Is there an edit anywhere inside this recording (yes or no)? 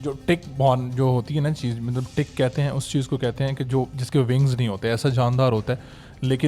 no